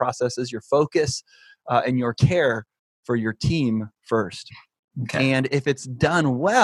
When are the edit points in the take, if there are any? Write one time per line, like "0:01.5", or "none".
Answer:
none